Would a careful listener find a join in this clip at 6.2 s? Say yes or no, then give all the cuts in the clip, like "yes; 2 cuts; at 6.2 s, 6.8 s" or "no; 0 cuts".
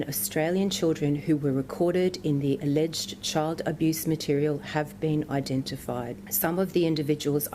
yes; 1 cut; at 6.2 s